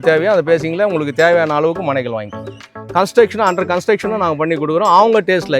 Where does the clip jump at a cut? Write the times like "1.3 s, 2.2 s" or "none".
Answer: 2.7 s